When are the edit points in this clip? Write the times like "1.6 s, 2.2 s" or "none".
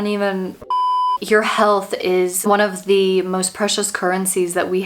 1.1 s, 2.5 s